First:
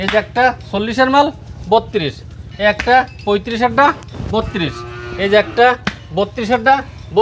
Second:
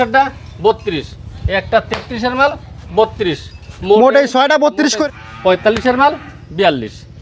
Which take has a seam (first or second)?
second